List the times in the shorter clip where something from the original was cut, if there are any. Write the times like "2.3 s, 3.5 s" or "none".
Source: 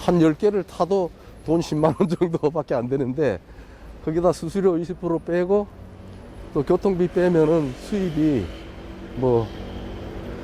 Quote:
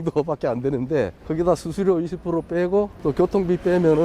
1.2 s, 2.9 s